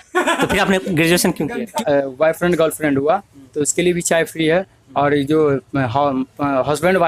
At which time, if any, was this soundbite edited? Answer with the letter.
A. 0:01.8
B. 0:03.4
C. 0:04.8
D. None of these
A